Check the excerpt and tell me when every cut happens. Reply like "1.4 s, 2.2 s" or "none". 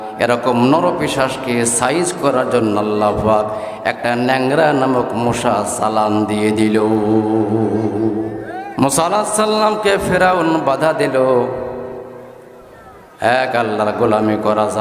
8.5 s